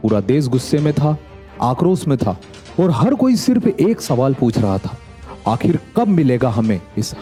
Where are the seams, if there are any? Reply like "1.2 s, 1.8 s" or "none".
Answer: none